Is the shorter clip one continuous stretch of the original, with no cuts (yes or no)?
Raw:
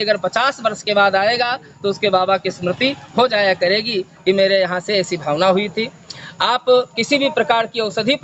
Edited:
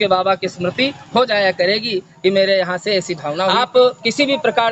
no